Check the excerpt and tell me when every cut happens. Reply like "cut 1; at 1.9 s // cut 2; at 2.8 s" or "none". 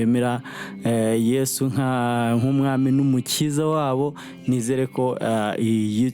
none

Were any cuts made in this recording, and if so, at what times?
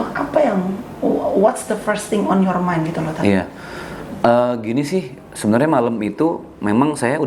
none

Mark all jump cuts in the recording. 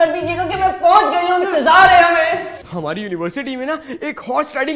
cut 1; at 2.6 s

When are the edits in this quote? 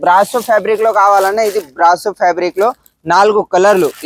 none

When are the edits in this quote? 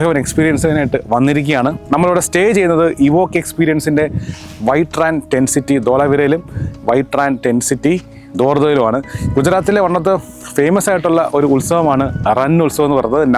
cut 1; at 1.8 s

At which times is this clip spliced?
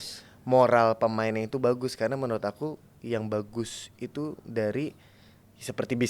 none

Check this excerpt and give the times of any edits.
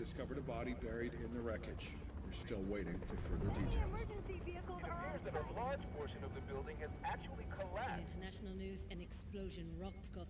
none

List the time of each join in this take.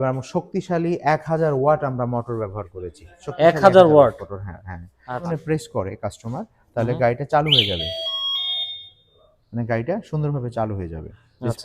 cut 1; at 5.2 s

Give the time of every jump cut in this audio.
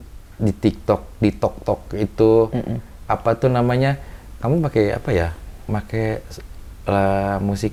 none

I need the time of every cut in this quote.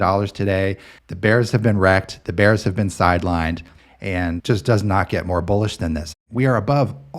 cut 1; at 3.7 s // cut 2; at 6.2 s

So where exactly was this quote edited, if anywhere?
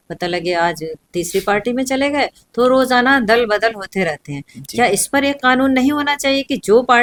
none

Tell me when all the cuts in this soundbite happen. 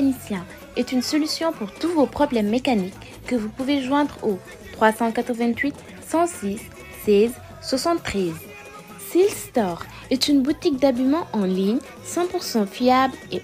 none

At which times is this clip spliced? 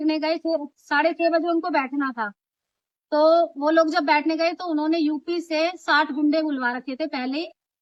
none

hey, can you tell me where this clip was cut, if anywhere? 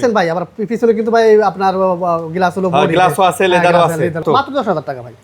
cut 1; at 4.2 s

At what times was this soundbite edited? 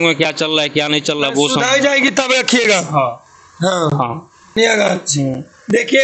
cut 1; at 4.6 s

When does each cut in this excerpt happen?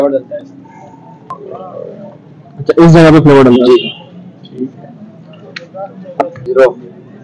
cut 1; at 1.4 s // cut 2; at 6.4 s

